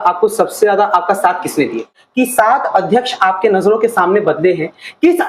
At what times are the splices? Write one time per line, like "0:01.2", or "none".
0:02.0